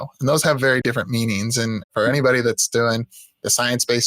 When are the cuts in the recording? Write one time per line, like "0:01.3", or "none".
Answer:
0:00.8
0:01.9